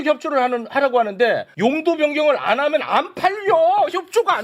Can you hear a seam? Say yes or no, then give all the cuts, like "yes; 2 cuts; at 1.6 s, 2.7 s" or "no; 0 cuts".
yes; 1 cut; at 1.5 s